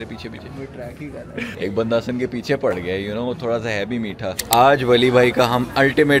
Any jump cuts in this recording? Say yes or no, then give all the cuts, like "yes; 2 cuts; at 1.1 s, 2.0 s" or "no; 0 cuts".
yes; 2 cuts; at 1.5 s, 4.4 s